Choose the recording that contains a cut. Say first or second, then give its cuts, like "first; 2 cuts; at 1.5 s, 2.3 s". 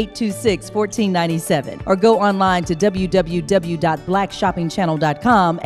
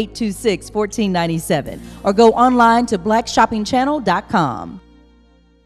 first; 1 cut; at 1.7 s